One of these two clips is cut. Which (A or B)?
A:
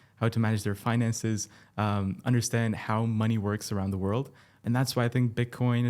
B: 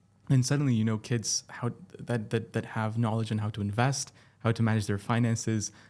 A